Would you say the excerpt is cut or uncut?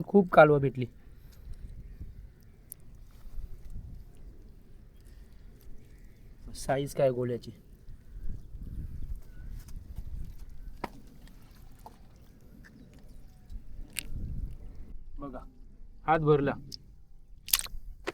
cut